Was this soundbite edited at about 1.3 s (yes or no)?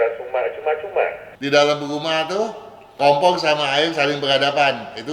yes